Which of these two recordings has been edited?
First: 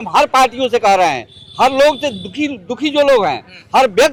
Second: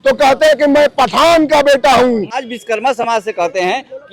second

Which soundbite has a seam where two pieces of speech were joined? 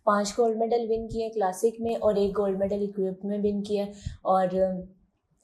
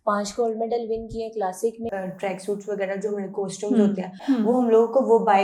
second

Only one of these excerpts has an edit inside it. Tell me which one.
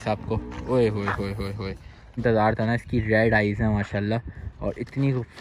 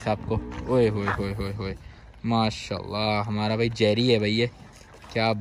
first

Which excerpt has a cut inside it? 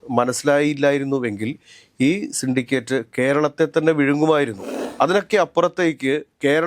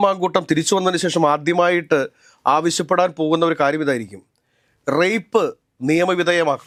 first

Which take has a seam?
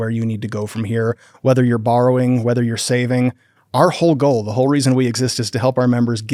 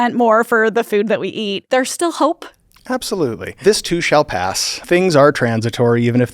second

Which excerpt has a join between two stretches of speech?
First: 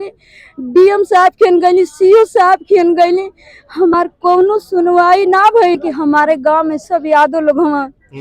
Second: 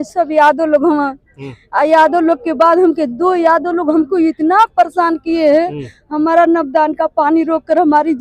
first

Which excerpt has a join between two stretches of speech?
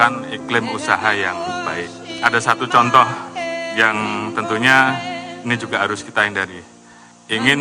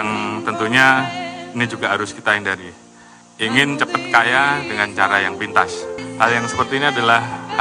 second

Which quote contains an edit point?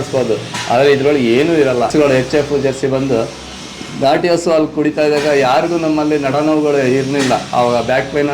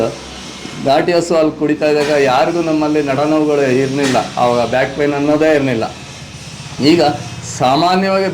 first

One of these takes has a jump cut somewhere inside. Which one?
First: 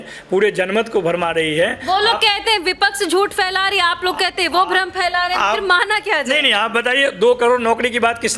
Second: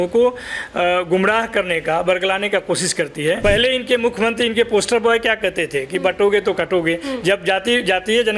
second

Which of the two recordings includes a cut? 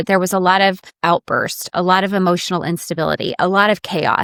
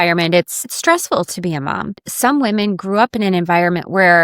second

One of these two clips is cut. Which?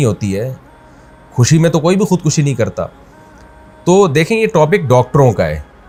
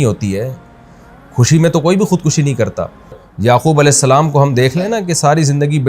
second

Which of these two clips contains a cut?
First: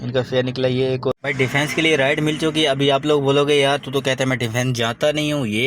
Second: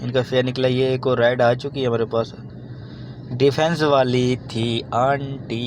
first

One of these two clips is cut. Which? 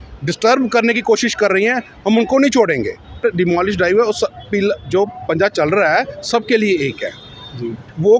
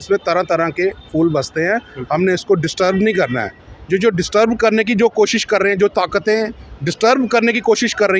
first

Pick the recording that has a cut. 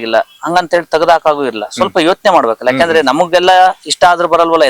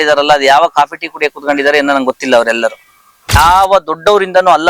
second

